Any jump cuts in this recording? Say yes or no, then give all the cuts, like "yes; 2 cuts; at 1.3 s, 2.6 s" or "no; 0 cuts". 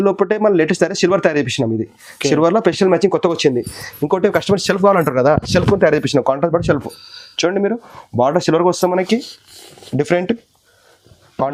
no; 0 cuts